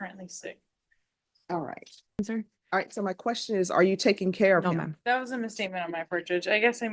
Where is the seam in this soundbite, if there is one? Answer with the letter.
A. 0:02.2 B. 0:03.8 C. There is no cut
A